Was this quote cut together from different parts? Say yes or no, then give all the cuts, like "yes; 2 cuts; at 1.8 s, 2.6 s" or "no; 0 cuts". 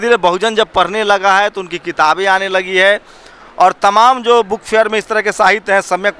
no; 0 cuts